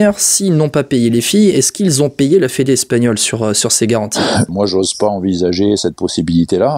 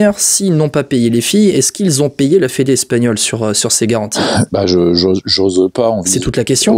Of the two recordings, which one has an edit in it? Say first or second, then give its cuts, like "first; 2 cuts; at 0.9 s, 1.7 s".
first; 1 cut; at 4.5 s